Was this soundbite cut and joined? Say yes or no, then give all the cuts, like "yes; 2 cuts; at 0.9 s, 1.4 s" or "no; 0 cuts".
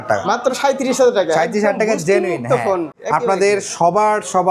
yes; 1 cut; at 2.9 s